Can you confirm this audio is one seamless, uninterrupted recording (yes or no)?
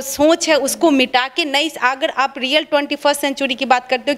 yes